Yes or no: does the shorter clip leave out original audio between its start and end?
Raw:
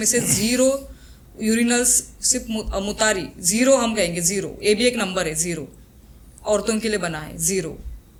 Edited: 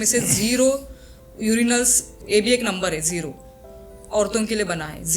yes